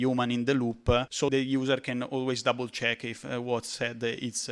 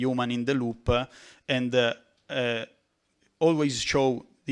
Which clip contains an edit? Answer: first; 1 cut; at 1.2 s

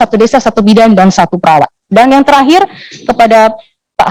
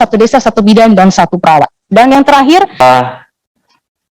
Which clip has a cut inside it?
second; 1 cut; at 2.8 s

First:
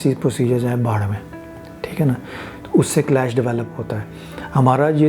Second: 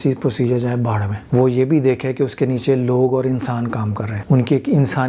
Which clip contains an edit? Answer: second; 2 cuts; at 1.1 s, 4.1 s

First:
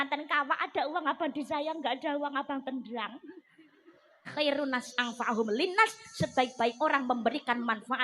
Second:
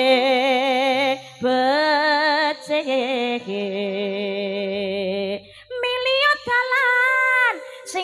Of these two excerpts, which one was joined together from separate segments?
first; 1 cut; at 4.3 s

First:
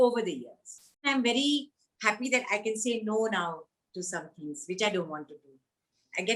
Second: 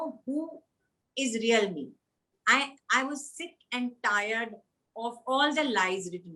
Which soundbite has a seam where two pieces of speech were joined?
first; 1 cut; at 1.1 s

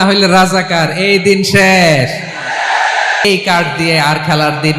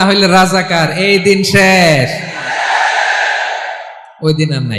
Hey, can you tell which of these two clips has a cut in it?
first; 1 cut; at 3.2 s

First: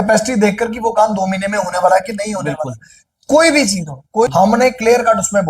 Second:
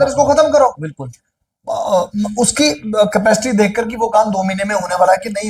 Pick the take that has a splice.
first; 1 cut; at 4.0 s

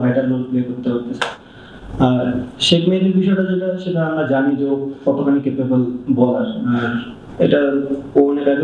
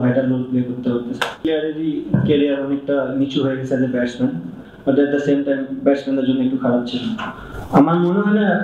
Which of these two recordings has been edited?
second; 2 cuts; at 1.3 s, 4.6 s

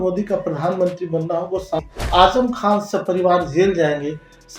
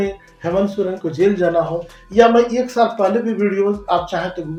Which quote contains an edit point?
first; 1 cut; at 1.8 s

